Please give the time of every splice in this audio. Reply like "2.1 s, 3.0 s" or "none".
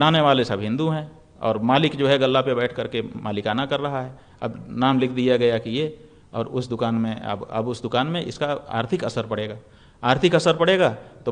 none